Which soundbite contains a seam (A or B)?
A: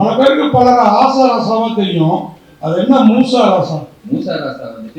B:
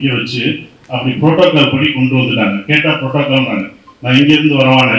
A